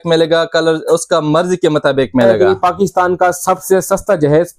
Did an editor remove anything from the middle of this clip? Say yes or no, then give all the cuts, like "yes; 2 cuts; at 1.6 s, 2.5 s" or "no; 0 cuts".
yes; 1 cut; at 2.3 s